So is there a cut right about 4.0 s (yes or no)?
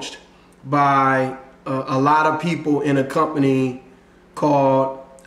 no